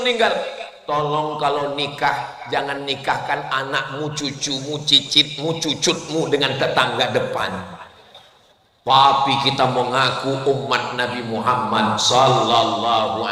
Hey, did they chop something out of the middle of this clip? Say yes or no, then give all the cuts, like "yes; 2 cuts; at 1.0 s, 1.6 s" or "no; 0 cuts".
no; 0 cuts